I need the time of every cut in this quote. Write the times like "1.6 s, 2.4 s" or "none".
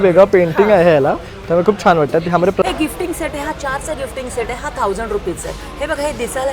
2.6 s